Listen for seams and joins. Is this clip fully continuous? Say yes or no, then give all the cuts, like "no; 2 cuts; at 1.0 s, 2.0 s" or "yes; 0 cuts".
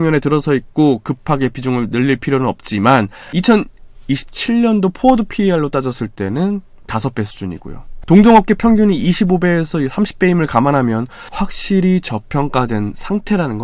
no; 1 cut; at 3.2 s